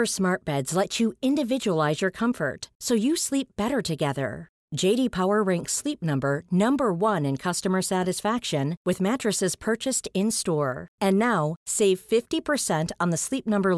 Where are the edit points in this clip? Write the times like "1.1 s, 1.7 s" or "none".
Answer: none

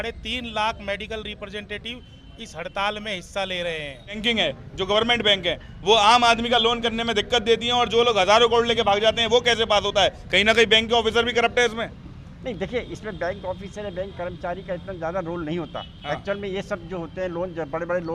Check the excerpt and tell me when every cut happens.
4.2 s

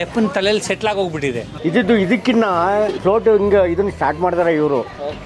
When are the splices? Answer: 1.5 s, 3.0 s

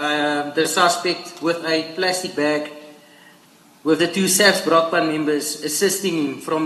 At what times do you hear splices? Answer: none

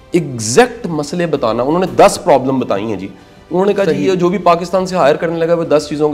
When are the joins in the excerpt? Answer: none

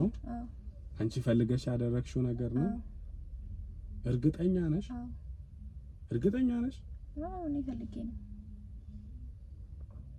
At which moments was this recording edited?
none

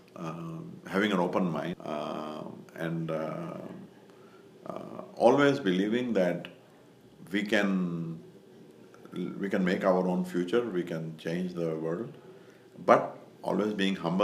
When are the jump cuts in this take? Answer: 1.8 s

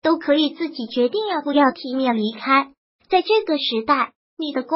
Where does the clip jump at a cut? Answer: 2.9 s

